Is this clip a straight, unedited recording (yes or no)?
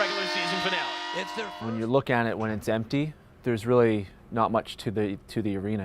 yes